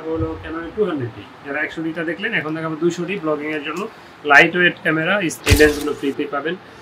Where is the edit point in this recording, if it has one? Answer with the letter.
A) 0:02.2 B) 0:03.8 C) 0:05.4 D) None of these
C